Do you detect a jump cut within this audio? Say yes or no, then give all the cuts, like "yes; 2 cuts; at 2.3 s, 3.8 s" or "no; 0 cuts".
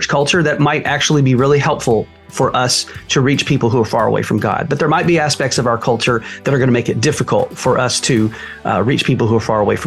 no; 0 cuts